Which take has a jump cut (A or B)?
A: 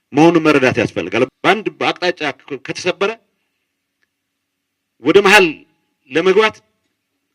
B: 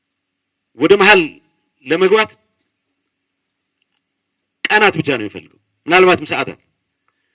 A